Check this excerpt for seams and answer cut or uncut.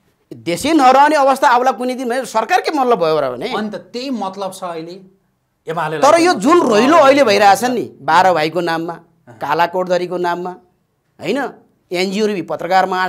uncut